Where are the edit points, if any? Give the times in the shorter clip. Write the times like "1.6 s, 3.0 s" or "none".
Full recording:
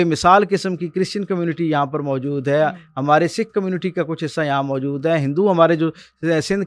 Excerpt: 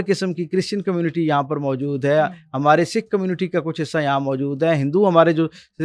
none